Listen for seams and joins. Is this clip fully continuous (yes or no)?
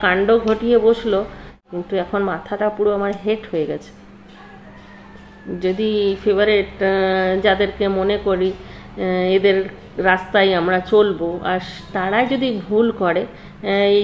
yes